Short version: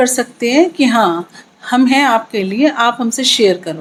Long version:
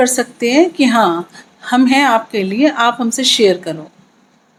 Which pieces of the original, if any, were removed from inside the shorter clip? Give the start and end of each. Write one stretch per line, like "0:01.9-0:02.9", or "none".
none

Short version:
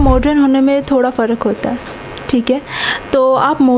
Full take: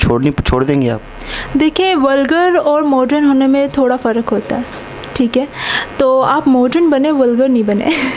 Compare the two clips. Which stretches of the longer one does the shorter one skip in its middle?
none

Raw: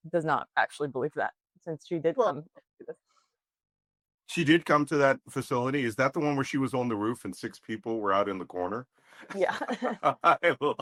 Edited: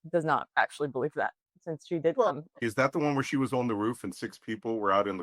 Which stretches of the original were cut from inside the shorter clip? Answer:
0:02.6-0:05.8

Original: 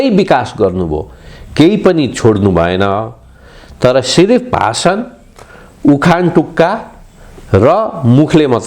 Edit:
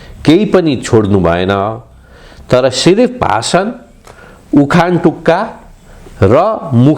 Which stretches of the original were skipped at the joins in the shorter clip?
none

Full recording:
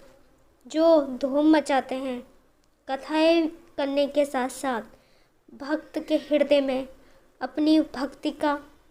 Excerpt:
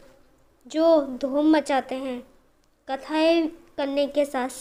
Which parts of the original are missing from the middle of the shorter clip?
none

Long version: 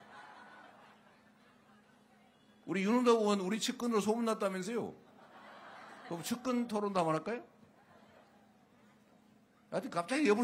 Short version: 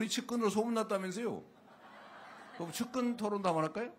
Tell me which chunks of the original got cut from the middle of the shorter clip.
none

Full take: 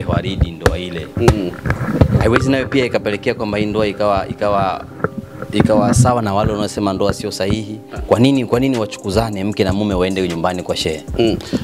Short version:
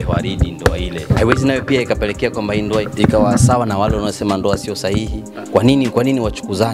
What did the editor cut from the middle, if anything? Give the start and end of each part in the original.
0:01.1-0:02.1
0:03.9-0:05.4

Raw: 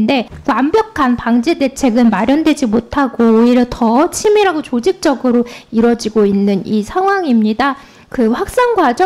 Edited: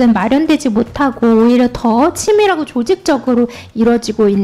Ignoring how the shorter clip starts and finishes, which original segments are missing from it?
none

